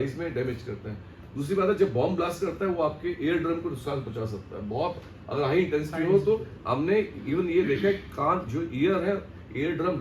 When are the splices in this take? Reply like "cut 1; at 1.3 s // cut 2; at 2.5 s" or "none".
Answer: none